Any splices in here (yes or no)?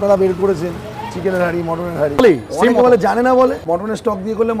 yes